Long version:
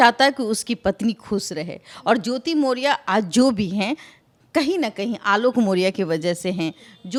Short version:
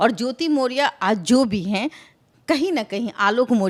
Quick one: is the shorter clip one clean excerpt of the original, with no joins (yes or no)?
yes